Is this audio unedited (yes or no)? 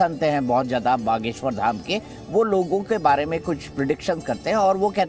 yes